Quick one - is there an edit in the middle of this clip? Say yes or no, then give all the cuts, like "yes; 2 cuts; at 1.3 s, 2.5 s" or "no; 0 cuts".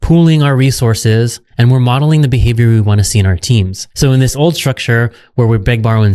yes; 1 cut; at 3.8 s